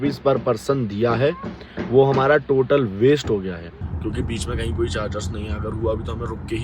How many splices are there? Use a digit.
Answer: 1